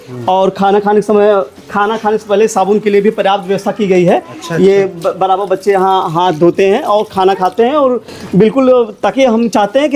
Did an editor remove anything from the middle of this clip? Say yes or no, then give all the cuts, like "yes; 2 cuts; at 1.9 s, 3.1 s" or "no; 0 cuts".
no; 0 cuts